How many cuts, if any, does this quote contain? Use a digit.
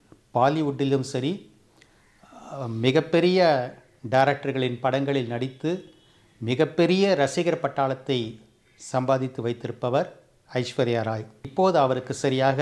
1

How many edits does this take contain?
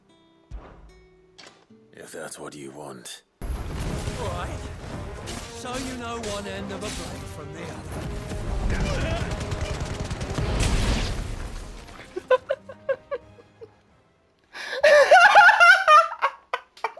1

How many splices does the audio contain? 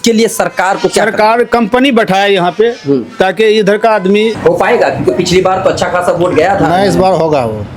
1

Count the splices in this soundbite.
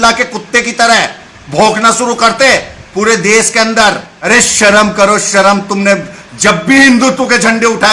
1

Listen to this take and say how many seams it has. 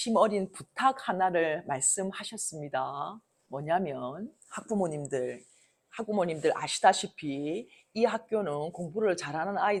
0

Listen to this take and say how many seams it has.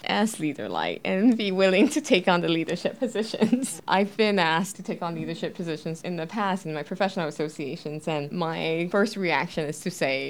1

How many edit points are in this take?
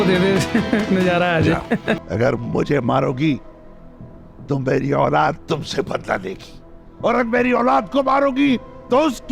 1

